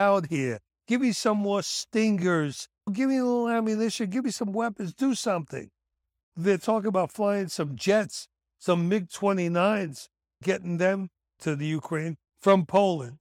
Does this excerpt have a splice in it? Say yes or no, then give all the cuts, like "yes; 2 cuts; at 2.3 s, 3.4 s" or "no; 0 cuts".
yes; 1 cut; at 6.3 s